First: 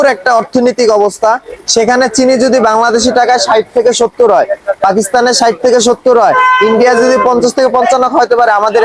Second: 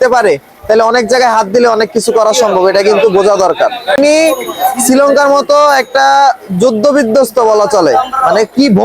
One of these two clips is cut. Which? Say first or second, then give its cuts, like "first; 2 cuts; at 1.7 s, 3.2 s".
second; 1 cut; at 4.0 s